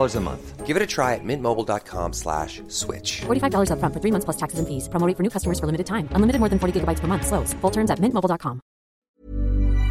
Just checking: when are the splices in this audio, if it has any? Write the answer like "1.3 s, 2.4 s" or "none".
9.0 s

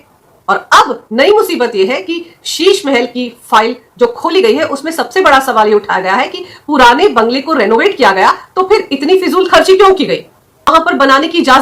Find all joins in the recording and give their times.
10.7 s

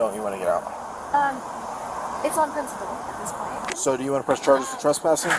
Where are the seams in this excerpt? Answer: 3.8 s

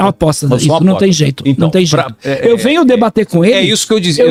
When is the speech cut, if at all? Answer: none

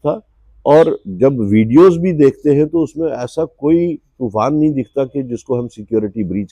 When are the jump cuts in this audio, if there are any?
none

